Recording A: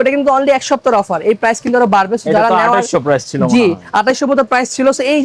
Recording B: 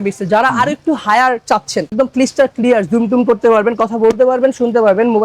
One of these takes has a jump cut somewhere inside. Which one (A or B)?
B